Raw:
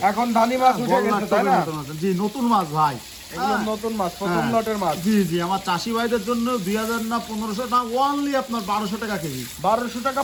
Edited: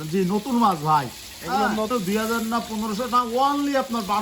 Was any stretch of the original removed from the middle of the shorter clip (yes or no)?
yes